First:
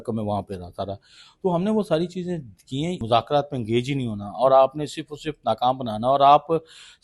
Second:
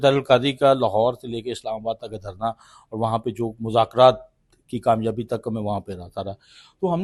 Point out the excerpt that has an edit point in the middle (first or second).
first